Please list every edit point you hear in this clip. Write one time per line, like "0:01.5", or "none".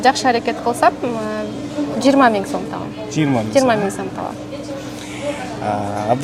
none